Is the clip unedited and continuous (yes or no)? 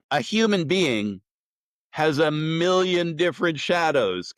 yes